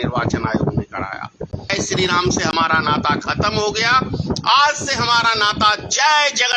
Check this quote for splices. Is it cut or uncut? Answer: cut